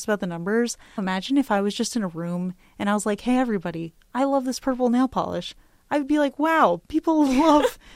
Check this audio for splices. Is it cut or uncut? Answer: cut